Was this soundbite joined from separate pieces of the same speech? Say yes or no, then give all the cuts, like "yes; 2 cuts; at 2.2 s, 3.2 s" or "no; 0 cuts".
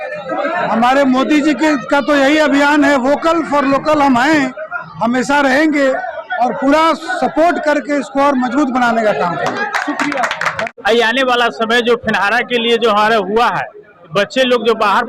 no; 0 cuts